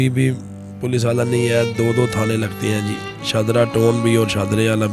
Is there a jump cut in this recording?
no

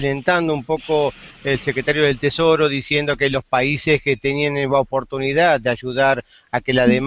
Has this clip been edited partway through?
no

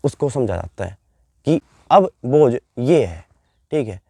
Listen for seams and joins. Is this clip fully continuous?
yes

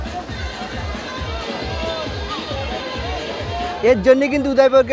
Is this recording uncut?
no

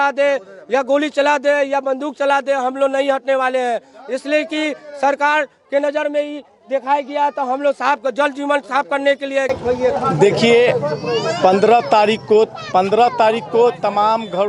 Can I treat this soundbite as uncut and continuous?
yes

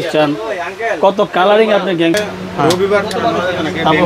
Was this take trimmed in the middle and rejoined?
yes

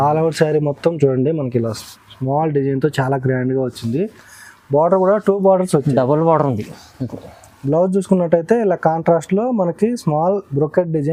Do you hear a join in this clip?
no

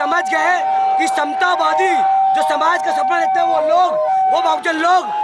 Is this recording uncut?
yes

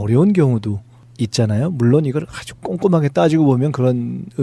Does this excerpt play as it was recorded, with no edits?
yes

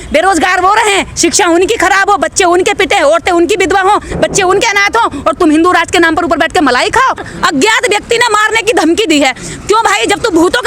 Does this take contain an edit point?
yes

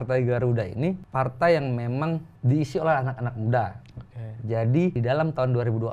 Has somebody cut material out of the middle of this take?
yes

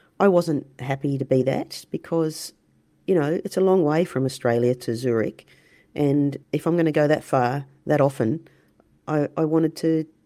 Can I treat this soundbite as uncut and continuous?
yes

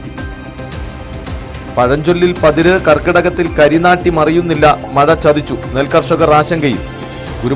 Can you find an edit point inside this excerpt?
yes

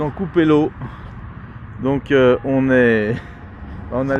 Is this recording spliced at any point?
no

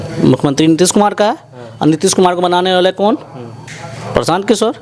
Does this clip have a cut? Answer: no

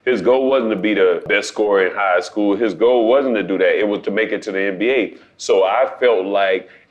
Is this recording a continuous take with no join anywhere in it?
no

